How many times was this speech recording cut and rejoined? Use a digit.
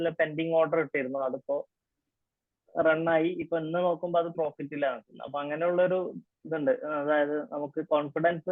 0